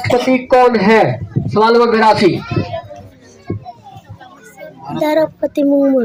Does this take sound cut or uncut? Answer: uncut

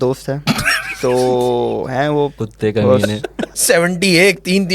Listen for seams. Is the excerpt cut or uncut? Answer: cut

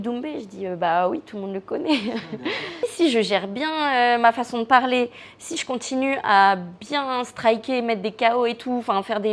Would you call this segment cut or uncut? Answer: cut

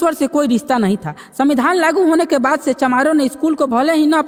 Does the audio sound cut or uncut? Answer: uncut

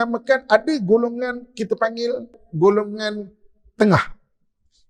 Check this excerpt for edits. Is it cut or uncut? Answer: cut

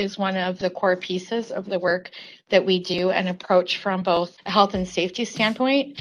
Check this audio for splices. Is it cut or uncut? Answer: uncut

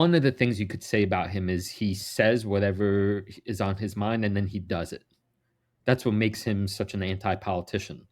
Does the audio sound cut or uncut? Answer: uncut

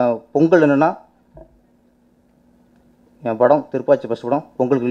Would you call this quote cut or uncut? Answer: uncut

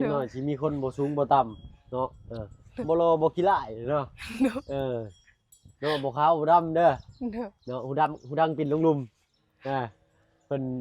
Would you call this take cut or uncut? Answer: uncut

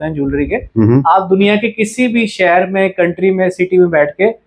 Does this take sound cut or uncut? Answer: uncut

